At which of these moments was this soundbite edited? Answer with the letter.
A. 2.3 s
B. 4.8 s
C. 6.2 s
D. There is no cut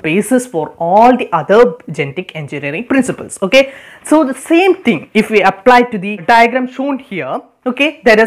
C